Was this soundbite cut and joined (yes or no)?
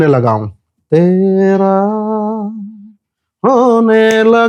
no